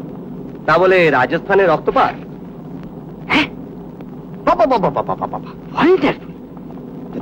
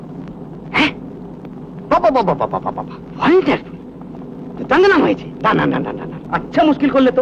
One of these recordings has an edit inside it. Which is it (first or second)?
second